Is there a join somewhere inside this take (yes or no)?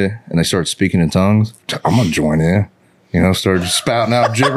yes